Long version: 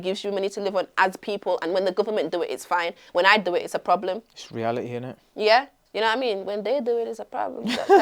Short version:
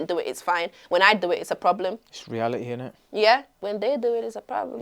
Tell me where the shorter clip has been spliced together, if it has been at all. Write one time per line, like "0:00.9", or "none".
0:03.6